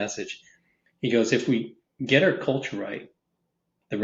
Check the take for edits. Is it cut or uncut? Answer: uncut